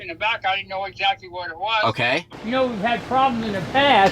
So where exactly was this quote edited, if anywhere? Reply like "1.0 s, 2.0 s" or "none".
2.3 s